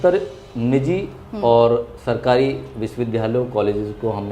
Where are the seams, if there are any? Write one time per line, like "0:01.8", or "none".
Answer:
none